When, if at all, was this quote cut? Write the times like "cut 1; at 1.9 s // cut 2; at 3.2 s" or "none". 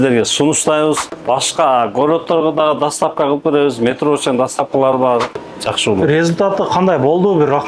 cut 1; at 1.1 s // cut 2; at 5.3 s